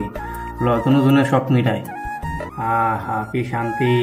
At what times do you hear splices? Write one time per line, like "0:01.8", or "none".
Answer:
0:02.5